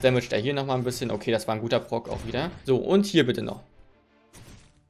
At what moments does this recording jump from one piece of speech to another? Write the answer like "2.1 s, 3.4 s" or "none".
2.6 s